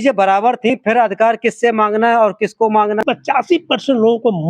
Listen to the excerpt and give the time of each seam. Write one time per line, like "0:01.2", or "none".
0:03.0